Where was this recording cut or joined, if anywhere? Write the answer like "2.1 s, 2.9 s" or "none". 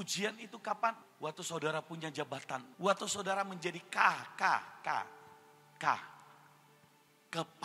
1.1 s, 2.7 s